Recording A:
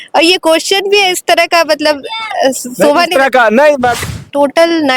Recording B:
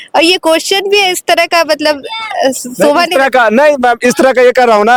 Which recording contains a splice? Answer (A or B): A